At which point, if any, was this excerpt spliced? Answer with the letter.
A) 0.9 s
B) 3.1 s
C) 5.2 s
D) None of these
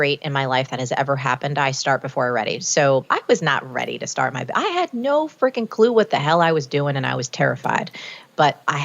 B